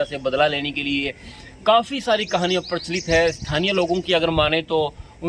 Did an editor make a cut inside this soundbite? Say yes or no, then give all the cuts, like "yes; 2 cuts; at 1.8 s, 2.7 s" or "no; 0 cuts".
no; 0 cuts